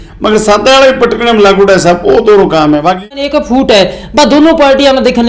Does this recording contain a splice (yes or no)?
yes